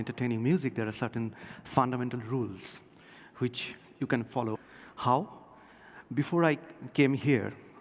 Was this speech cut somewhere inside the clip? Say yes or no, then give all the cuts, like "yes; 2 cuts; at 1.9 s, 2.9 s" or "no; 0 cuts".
no; 0 cuts